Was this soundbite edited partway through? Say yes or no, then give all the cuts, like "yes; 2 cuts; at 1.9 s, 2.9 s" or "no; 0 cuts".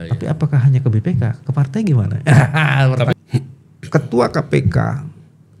yes; 1 cut; at 3.1 s